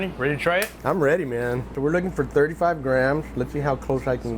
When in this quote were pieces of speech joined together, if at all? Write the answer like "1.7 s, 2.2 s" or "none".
1.8 s